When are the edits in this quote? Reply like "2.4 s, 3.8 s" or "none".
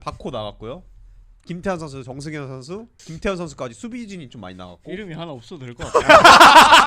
none

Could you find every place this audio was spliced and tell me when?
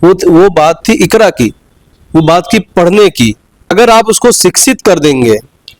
3.7 s

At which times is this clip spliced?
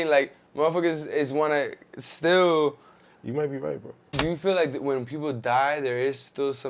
4.2 s

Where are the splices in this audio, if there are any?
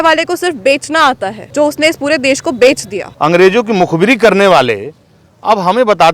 1.4 s, 3.0 s

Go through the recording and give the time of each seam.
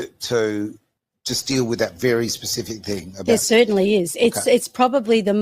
none

